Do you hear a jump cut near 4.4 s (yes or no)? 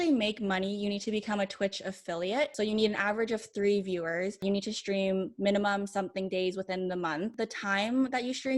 yes